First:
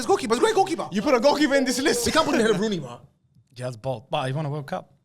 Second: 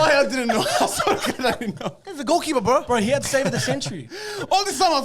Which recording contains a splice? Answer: first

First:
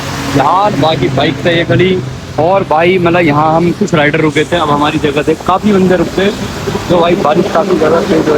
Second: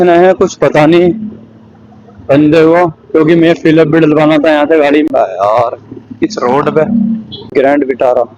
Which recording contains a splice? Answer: second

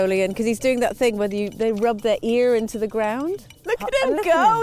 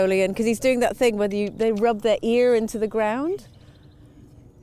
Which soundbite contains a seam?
first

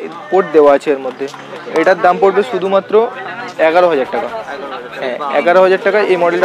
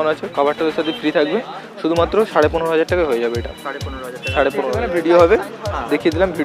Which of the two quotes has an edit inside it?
second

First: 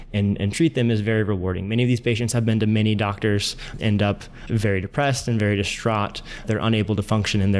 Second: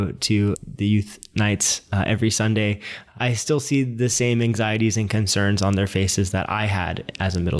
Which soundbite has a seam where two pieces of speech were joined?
first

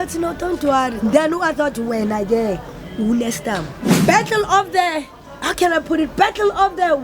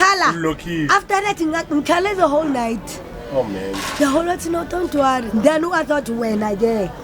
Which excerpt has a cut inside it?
first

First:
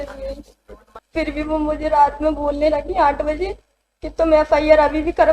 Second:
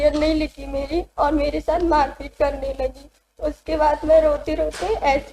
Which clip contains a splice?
first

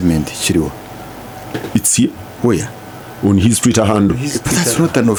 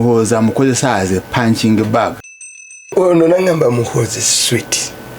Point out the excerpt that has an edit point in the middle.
second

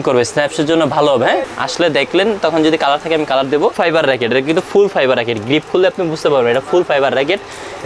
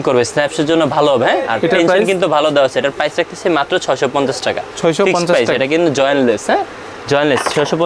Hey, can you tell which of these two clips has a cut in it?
first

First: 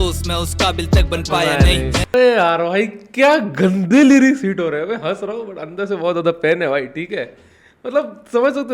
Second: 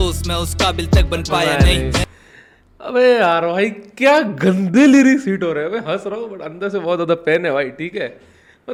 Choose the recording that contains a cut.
first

